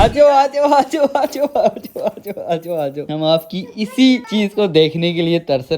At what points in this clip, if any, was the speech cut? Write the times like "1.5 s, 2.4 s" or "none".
3.1 s, 4.3 s